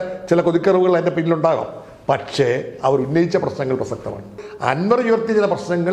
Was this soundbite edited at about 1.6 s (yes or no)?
no